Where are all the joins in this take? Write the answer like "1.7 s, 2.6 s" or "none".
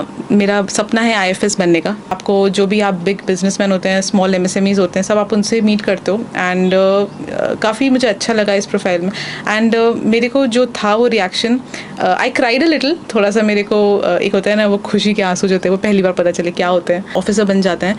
2.1 s, 17.1 s